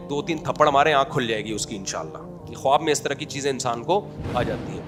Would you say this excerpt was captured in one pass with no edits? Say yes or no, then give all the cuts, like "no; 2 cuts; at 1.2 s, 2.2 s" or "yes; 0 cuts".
yes; 0 cuts